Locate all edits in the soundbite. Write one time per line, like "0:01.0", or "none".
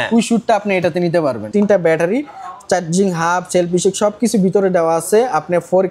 0:01.5